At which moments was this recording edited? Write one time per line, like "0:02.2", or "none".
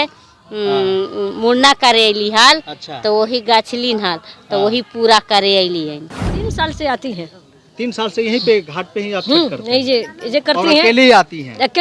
0:06.0